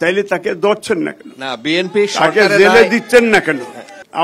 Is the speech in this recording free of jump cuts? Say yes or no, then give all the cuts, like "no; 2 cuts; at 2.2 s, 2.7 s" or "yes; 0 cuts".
yes; 0 cuts